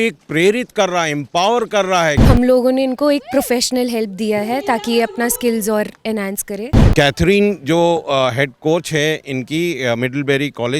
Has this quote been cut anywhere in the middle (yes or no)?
yes